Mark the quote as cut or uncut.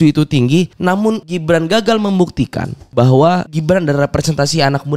cut